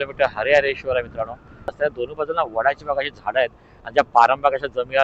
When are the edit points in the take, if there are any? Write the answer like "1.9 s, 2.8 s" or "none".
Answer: 1.8 s